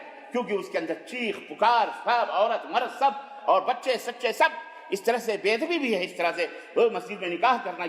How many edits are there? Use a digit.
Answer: 0